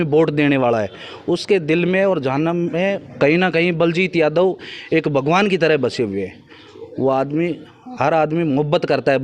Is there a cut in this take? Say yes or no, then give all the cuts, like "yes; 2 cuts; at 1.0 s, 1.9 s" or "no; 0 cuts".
no; 0 cuts